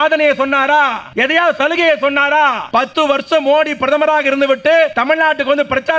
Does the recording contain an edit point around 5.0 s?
yes; 3 cuts; at 1.0 s, 2.8 s, 5.0 s

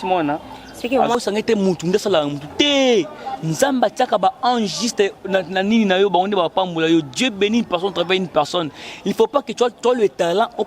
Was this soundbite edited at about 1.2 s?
yes; 1 cut; at 1.2 s

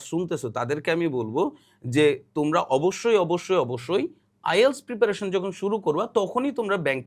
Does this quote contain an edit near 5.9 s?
no; 0 cuts

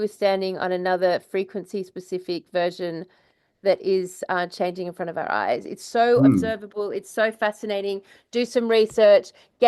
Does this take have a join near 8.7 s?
no; 0 cuts

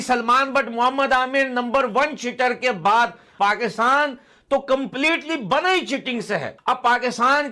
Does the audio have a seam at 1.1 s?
no; 2 cuts; at 3.2 s, 6.5 s

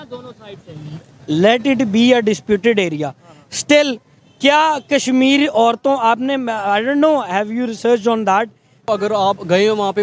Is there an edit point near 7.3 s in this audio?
no; 1 cut; at 8.9 s

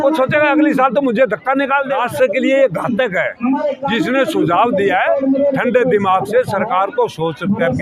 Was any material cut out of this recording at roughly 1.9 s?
yes; 1 cut; at 1.9 s

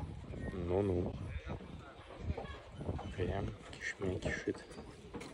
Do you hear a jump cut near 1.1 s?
no; 0 cuts

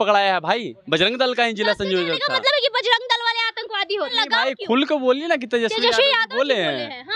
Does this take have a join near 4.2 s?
yes; 1 cut; at 4.2 s

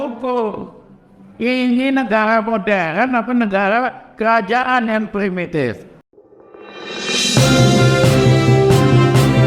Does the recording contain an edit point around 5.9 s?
yes; 1 cut; at 5.9 s

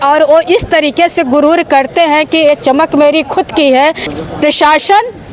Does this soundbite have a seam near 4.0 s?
yes; 1 cut; at 4.0 s

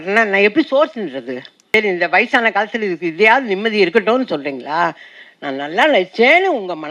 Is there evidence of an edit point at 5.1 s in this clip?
no; 1 cut; at 1.5 s

